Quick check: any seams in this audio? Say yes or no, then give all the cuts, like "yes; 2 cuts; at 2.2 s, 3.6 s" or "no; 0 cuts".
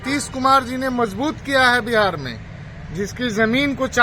no; 0 cuts